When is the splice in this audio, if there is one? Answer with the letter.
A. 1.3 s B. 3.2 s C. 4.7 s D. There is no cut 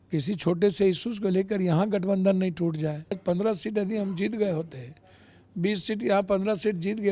B